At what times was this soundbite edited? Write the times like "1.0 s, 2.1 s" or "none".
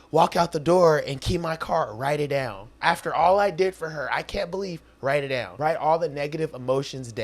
2.6 s, 5.5 s